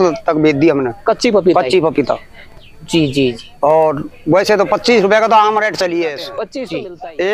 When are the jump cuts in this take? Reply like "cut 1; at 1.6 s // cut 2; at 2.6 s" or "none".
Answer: cut 1; at 6.3 s